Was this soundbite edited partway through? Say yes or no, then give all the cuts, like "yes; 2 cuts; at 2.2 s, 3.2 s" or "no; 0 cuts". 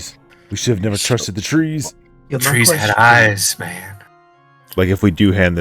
yes; 1 cut; at 4.3 s